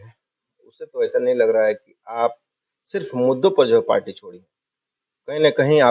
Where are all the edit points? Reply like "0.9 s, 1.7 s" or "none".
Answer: none